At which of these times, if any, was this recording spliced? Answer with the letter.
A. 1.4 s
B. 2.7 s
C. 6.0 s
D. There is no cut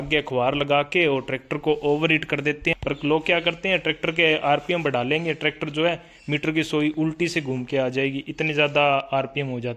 B